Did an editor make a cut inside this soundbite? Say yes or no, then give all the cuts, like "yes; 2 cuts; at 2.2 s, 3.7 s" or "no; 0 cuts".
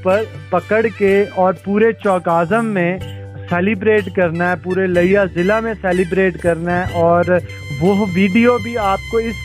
no; 0 cuts